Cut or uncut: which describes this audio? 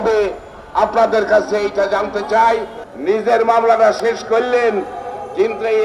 cut